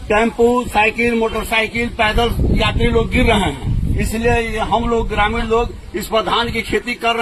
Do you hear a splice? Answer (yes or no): no